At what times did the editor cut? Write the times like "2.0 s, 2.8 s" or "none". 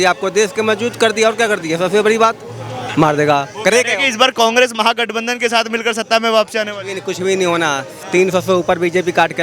2.8 s